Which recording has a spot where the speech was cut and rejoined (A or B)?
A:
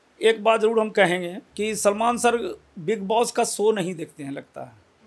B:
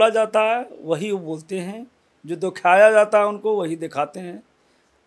A